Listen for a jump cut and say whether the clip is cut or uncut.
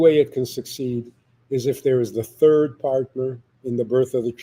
cut